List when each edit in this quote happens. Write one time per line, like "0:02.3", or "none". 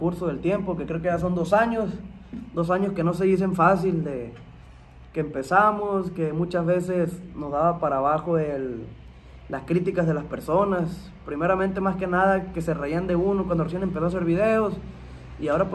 none

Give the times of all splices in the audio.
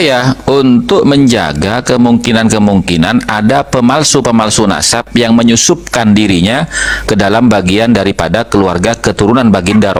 none

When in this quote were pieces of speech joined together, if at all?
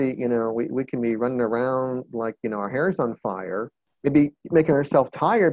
0:03.8

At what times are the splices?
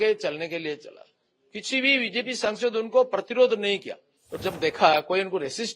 0:04.3

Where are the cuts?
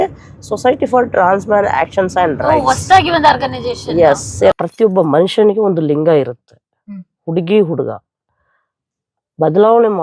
0:04.5

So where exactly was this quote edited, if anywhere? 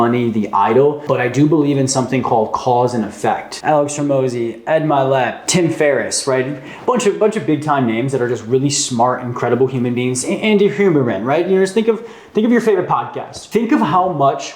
0:01.0
0:03.5
0:05.5
0:13.4

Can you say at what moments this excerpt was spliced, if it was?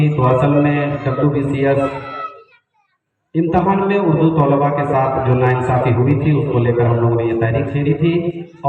none

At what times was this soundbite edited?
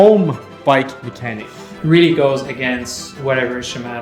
0:01.7

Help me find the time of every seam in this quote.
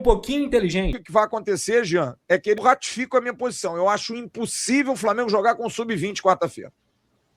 0:01.0
0:02.6

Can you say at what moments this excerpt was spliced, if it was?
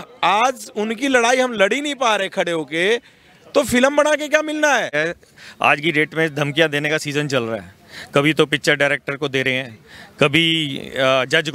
0:04.9

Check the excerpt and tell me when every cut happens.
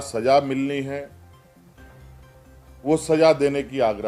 none

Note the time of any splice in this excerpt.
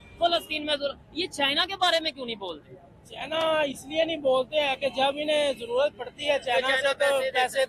none

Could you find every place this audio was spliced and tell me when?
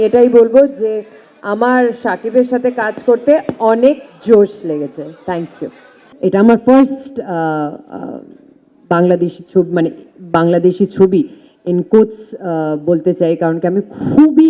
0:06.0

